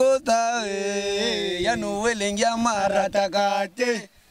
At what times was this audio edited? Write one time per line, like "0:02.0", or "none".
none